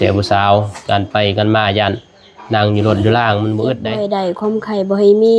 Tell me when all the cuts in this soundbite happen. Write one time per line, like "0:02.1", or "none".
0:03.9